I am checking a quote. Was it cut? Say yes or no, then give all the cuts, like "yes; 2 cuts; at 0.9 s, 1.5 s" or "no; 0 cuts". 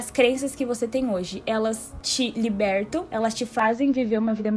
no; 0 cuts